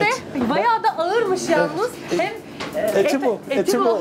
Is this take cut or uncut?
uncut